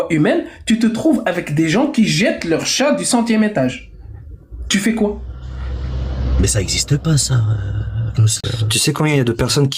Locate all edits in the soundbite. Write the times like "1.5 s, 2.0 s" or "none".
8.4 s